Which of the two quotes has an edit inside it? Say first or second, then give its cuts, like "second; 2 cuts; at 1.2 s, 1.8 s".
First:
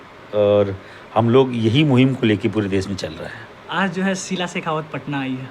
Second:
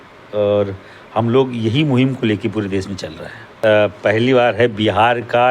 second; 1 cut; at 3.6 s